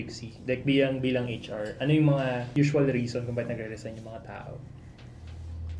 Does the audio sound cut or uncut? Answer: cut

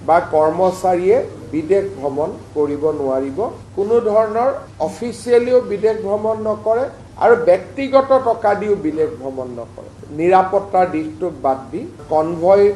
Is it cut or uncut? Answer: cut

